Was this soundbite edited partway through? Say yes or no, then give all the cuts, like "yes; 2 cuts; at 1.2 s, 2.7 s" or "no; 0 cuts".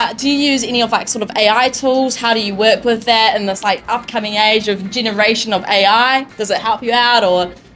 no; 0 cuts